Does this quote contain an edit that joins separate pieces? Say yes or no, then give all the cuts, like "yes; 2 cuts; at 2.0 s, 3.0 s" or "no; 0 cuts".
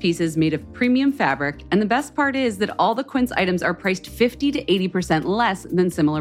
no; 0 cuts